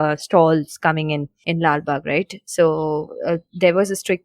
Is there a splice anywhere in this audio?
yes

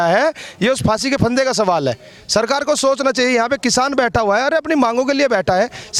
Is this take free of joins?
yes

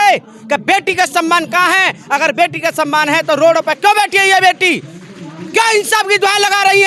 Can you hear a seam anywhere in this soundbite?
no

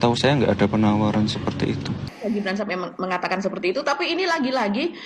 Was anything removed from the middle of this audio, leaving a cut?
yes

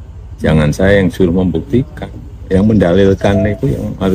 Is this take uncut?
yes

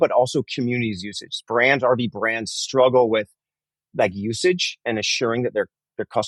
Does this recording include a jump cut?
no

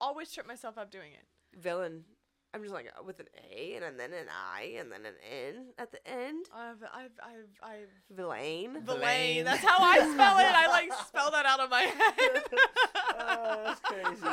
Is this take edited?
no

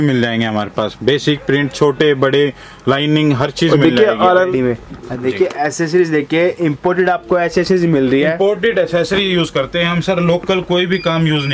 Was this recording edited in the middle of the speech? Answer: yes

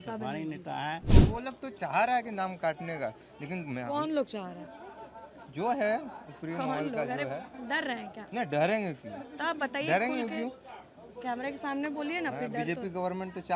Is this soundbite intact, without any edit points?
no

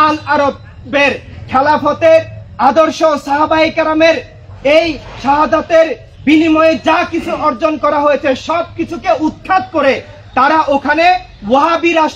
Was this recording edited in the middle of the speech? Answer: no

